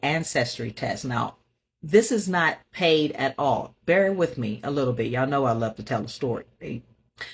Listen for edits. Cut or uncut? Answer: uncut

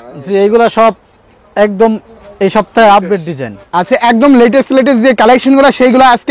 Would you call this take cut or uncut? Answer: uncut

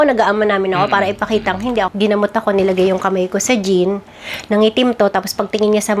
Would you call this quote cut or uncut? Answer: cut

